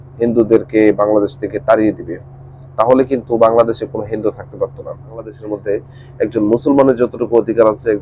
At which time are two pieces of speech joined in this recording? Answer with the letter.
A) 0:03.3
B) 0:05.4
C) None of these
B